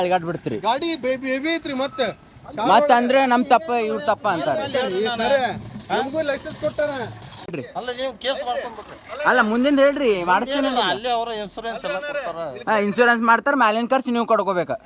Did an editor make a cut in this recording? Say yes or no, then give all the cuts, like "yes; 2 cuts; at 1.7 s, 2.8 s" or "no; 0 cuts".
yes; 1 cut; at 7.3 s